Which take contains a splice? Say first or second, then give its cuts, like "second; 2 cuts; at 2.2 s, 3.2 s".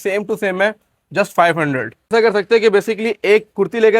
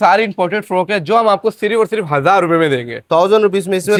first; 1 cut; at 2.1 s